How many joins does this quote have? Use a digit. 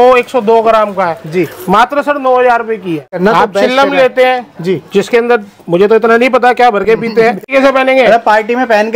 2